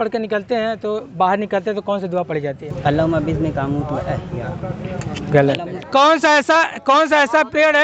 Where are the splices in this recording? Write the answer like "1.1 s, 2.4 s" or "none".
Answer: 2.7 s, 5.8 s